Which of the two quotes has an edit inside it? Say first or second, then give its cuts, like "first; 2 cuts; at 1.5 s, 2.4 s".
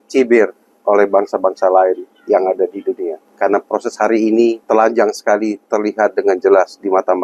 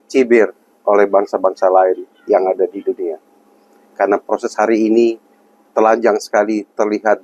first; 2 cuts; at 3.2 s, 4.6 s